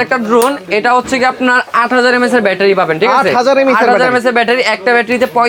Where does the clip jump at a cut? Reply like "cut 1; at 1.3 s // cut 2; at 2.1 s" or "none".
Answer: none